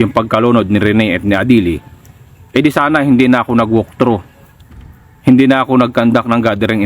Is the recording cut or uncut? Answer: uncut